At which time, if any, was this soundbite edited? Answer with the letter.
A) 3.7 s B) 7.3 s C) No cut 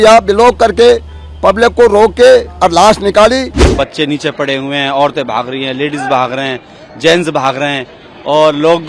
A